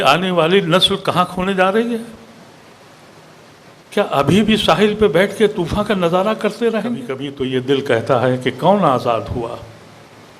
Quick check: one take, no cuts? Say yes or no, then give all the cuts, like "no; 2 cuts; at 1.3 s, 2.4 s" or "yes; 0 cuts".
no; 1 cut; at 7.3 s